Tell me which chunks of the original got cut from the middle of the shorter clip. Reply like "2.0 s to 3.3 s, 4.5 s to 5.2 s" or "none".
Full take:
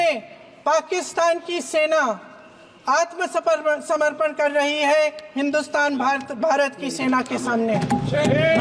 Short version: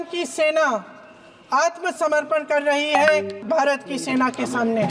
3.3 s to 3.8 s, 5.2 s to 6.3 s